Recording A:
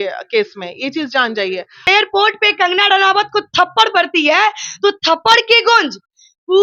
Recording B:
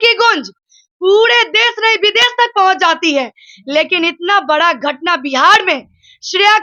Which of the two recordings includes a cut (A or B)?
A